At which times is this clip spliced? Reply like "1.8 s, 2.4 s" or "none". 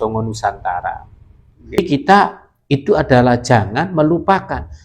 1.8 s